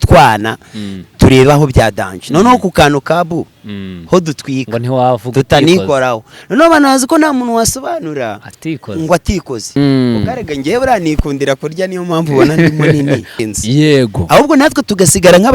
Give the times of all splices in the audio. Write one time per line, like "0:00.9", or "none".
0:09.8
0:13.4